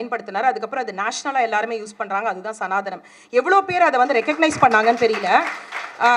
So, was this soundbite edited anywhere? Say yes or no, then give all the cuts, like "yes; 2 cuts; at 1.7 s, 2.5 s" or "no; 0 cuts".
no; 0 cuts